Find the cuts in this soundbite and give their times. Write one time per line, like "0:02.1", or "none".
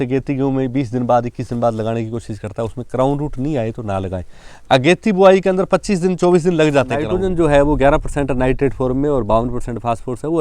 0:07.1